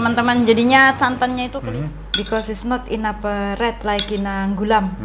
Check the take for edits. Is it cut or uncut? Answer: cut